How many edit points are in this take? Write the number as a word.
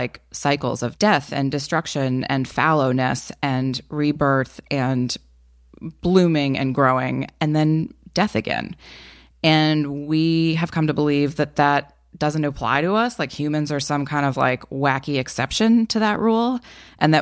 one